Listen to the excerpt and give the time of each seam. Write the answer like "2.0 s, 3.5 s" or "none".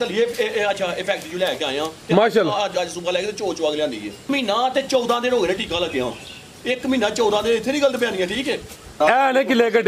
4.2 s, 8.8 s